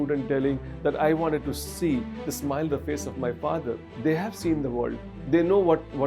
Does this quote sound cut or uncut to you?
cut